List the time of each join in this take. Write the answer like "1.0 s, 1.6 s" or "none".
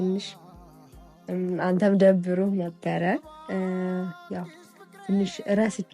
none